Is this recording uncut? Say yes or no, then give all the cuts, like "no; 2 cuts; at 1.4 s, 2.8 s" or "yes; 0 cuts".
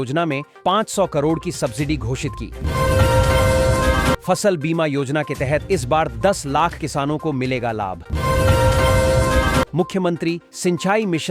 yes; 0 cuts